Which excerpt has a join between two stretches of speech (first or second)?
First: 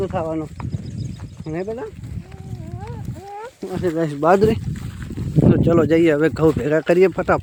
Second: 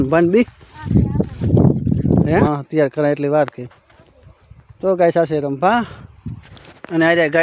second